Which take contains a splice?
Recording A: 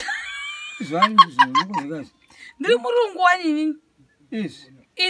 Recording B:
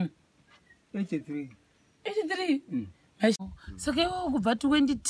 B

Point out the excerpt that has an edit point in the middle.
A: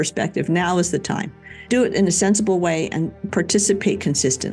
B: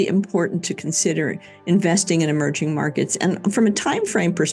A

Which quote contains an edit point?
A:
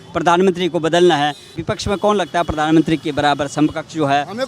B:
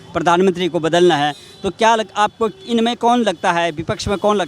A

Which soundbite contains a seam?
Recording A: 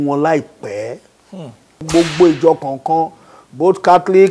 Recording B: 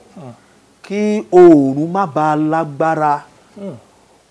A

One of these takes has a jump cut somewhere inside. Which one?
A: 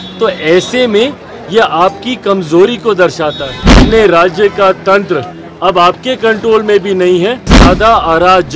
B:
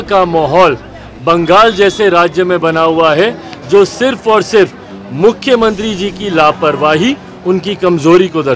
A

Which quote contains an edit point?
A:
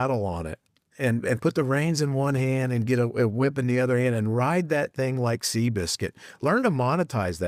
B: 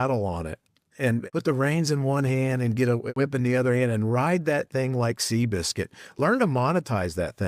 B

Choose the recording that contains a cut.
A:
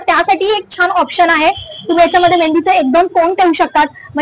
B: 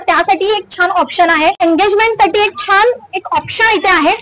B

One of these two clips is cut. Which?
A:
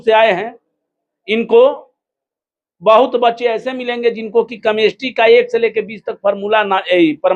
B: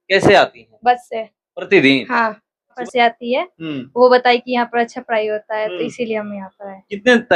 B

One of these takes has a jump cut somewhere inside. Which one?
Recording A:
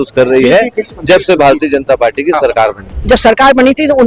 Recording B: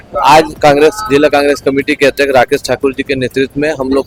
A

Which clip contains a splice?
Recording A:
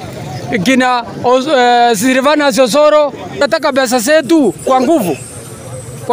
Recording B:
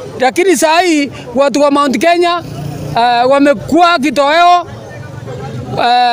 A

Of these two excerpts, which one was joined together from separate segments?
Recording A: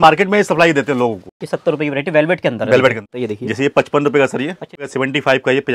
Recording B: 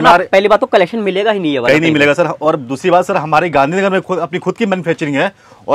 A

